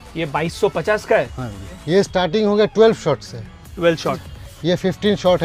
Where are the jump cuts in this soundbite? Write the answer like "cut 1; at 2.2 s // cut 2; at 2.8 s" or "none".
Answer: cut 1; at 1.8 s // cut 2; at 4.2 s